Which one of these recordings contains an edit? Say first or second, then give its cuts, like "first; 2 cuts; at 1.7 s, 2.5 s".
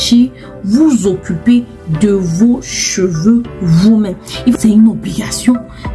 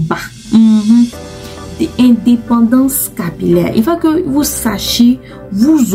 first; 1 cut; at 4.5 s